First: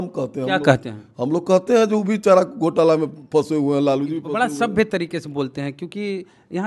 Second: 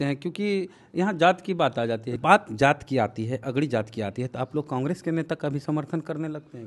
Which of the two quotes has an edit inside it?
second; 1 cut; at 2.1 s

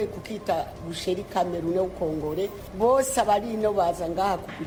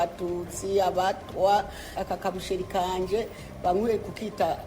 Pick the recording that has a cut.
second; 1 cut; at 1.9 s

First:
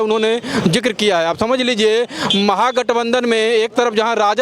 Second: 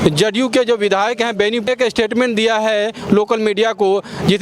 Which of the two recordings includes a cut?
second; 1 cut; at 1.7 s

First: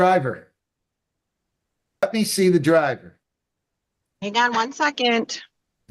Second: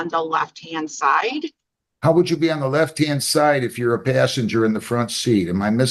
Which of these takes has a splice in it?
first; 1 cut; at 2.0 s

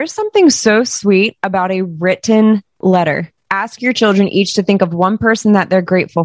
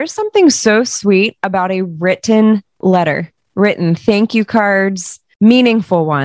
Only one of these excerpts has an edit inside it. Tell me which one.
first; 1 cut; at 3.4 s

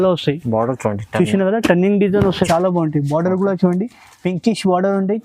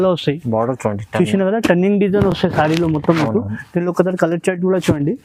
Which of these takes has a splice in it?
first; 1 cut; at 2.4 s

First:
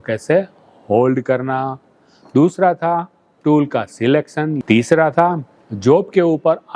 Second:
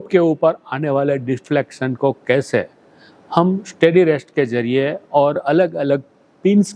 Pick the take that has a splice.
first; 1 cut; at 4.6 s

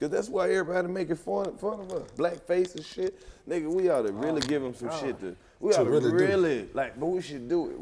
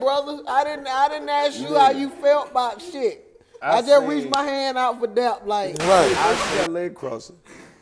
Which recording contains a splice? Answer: second; 1 cut; at 6.4 s

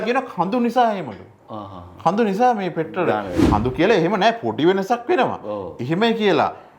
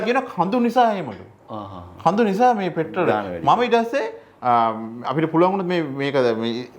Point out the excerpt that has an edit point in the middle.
first; 1 cut; at 3.3 s

